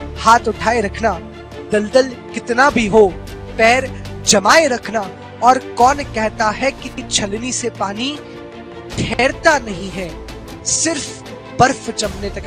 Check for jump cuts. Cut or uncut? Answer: uncut